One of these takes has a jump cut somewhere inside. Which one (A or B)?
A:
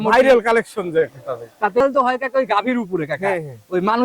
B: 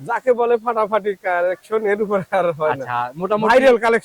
A